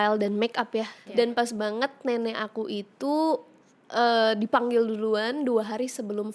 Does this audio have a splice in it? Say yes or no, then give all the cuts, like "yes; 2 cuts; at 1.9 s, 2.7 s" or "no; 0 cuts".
yes; 1 cut; at 1.0 s